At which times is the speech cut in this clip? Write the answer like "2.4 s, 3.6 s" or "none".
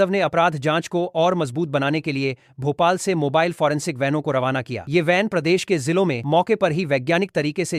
none